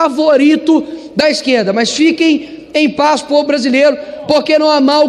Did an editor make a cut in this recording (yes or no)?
no